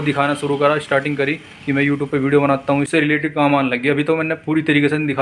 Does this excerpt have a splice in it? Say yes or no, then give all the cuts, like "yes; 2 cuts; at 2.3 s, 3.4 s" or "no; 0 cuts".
yes; 1 cut; at 2.9 s